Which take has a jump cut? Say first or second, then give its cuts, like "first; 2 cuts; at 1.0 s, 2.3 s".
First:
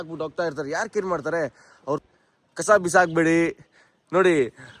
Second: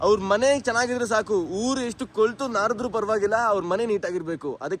first; 1 cut; at 2.1 s